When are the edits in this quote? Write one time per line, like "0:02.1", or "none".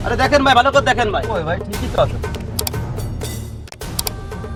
none